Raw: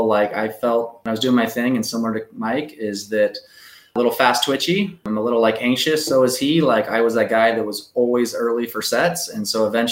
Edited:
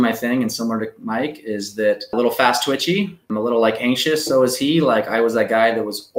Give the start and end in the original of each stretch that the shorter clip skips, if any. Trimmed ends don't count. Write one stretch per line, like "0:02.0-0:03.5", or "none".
0:03.4-0:03.9